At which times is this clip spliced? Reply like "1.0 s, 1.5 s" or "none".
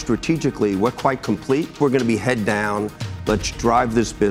1.7 s